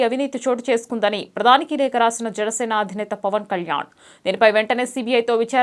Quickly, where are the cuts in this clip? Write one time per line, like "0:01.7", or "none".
none